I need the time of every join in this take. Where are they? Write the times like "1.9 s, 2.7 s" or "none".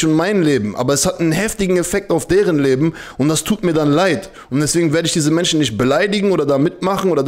none

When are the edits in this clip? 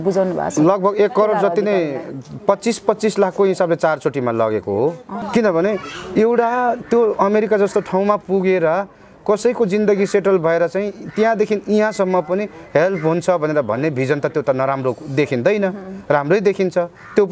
5.1 s

